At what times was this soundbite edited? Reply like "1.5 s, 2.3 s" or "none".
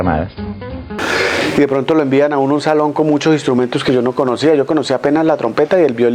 0.9 s